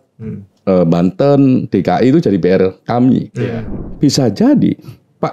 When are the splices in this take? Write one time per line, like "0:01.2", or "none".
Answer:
0:03.8